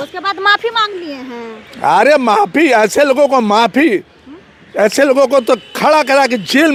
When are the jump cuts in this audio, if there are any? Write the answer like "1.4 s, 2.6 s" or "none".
none